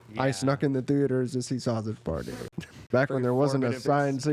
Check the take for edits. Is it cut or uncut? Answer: cut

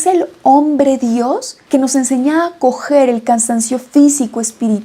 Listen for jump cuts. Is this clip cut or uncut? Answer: cut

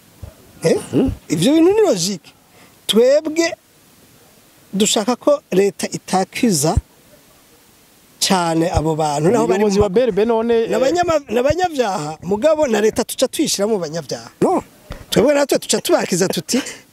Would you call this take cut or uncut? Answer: cut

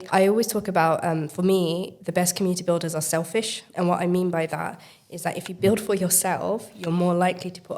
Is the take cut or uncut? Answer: cut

